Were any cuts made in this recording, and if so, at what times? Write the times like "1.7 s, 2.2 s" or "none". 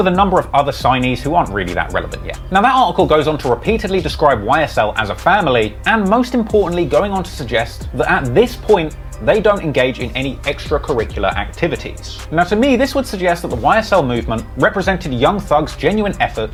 none